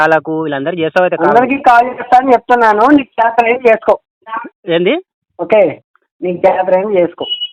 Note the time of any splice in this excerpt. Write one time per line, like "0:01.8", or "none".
none

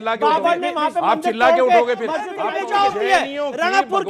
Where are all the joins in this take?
0:02.4

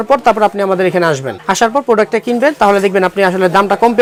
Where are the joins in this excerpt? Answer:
none

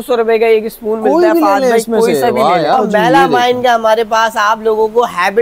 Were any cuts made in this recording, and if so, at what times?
0:02.8

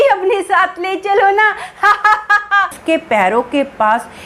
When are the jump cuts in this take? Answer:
0:02.8

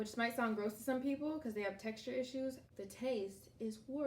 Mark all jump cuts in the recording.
0:02.6

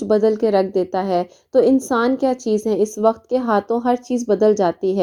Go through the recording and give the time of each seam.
none

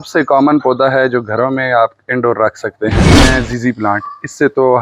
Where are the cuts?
0:03.2

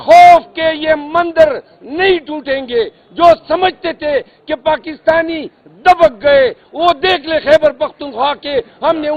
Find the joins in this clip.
none

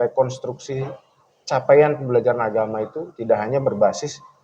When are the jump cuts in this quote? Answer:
none

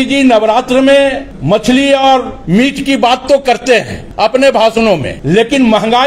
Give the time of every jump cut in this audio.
0:01.3
0:02.3
0:04.0
0:05.1

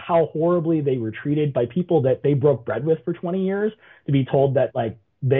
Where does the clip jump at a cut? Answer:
none

